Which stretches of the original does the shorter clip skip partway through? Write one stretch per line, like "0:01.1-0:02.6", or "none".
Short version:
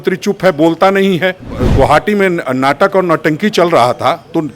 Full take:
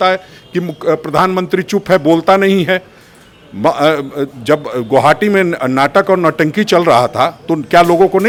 0:03.1-0:04.7